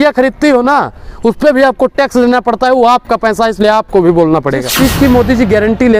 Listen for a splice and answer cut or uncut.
cut